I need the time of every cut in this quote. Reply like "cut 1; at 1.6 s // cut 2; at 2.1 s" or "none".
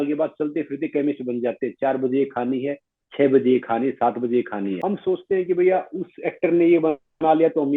cut 1; at 4.8 s